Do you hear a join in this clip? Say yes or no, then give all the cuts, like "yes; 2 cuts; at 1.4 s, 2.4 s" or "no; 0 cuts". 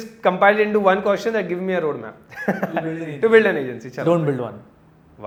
no; 0 cuts